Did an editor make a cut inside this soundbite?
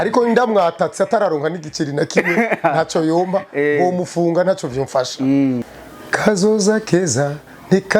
yes; 1 cut; at 5.7 s

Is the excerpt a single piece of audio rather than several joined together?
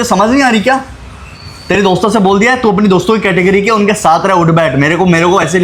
yes; 0 cuts

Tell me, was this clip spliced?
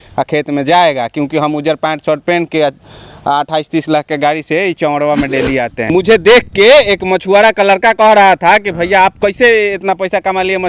yes; 1 cut; at 5.9 s

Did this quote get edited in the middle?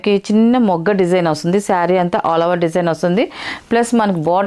no; 0 cuts

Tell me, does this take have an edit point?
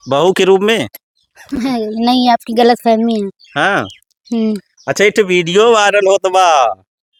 no; 0 cuts

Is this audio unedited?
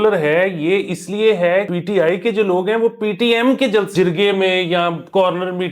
no; 2 cuts; at 1.7 s, 3.9 s

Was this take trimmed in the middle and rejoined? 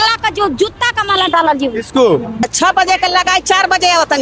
yes; 1 cut; at 2.4 s

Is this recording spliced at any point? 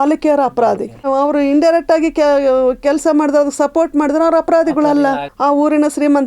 yes; 2 cuts; at 1.1 s, 5.3 s

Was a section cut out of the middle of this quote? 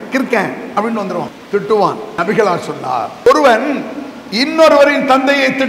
yes; 2 cuts; at 1.8 s, 3.3 s

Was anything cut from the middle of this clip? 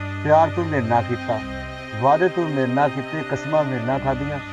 no; 0 cuts

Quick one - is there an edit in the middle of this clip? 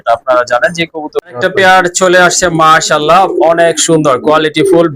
yes; 1 cut; at 1.2 s

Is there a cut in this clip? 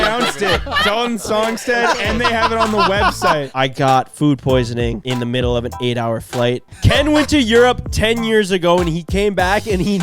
yes; 3 cuts; at 3.5 s, 5.0 s, 6.7 s

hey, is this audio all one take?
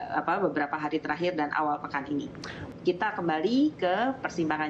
no; 1 cut; at 2.6 s

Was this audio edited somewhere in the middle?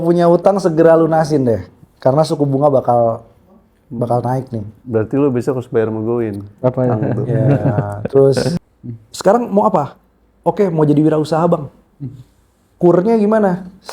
yes; 1 cut; at 8.5 s

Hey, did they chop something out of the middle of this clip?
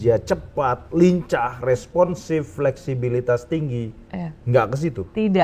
no; 0 cuts

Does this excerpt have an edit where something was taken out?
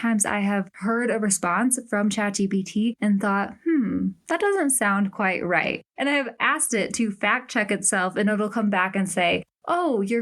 yes; 1 cut; at 6.2 s

